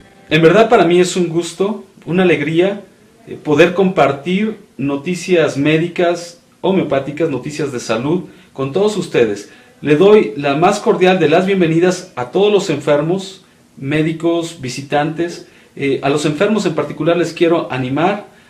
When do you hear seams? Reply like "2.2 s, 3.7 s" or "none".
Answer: 1.6 s